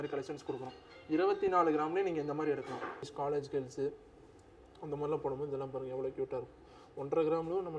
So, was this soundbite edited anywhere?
yes; 1 cut; at 3.1 s

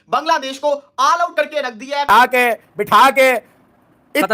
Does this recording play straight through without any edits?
no; 1 cut; at 2.1 s

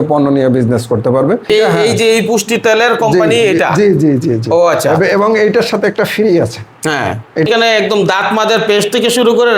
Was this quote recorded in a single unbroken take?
no; 2 cuts; at 1.5 s, 7.5 s

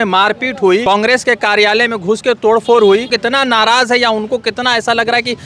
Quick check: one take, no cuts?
no; 2 cuts; at 0.8 s, 3.1 s

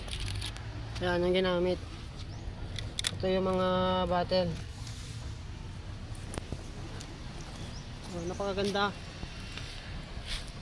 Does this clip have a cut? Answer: no; 0 cuts

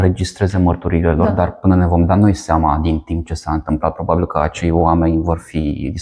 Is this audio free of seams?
yes; 0 cuts

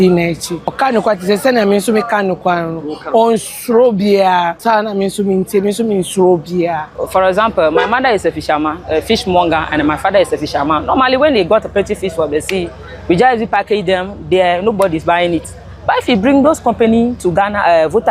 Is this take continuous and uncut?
no; 3 cuts; at 0.7 s, 4.6 s, 6.9 s

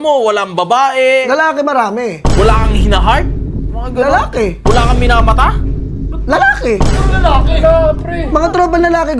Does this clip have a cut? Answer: no; 0 cuts

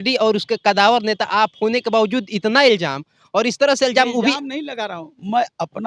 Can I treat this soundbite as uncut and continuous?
yes; 0 cuts

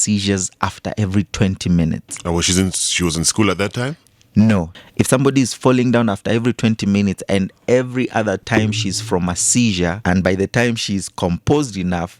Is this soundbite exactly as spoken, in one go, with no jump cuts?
no; 2 cuts; at 4.7 s, 10.0 s

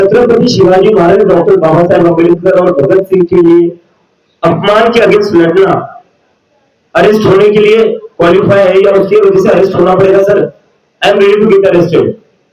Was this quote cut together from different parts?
no; 0 cuts

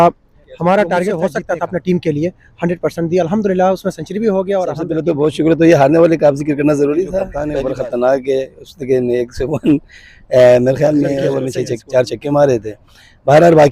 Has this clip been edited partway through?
yes; 4 cuts; at 1.2 s, 4.9 s, 7.4 s, 11.4 s

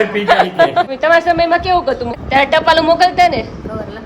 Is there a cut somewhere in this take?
yes; 2 cuts; at 0.9 s, 2.1 s

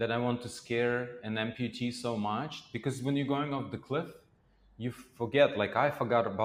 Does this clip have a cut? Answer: no; 0 cuts

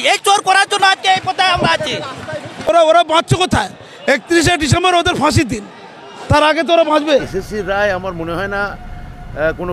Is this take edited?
yes; 1 cut; at 7.3 s

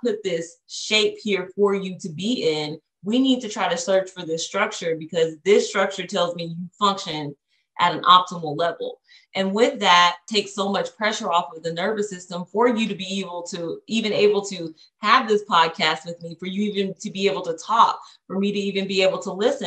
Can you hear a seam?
yes; 1 cut; at 10.2 s

